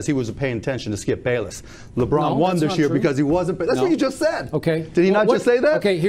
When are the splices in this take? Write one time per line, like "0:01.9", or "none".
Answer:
none